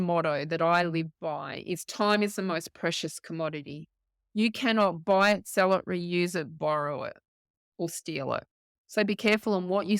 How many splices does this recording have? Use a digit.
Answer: 0